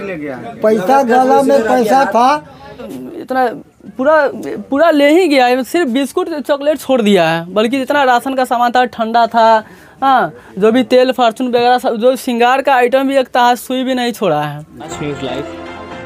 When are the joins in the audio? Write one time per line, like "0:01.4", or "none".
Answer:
0:02.9
0:14.9